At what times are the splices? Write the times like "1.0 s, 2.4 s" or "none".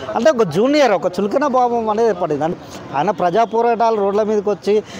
2.5 s